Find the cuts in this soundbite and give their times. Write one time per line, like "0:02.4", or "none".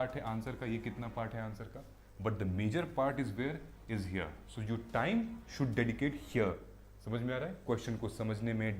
none